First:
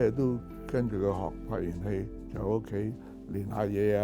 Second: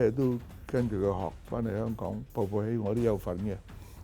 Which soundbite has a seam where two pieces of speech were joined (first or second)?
first